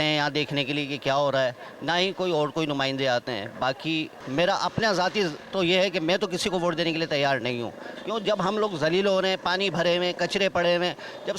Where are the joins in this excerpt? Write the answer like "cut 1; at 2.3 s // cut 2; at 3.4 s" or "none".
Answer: cut 1; at 4.2 s